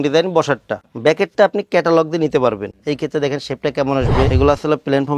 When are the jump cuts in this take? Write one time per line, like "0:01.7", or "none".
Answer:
0:02.7
0:04.3